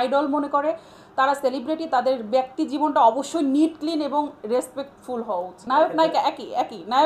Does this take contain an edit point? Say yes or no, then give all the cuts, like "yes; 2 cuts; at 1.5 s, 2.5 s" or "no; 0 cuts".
no; 0 cuts